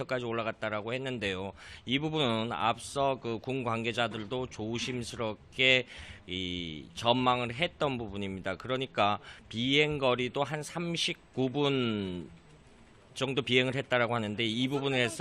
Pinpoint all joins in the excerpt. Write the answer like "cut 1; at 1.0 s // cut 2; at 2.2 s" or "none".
cut 1; at 5.6 s